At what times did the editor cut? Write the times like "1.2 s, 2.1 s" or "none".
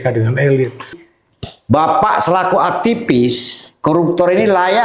1.0 s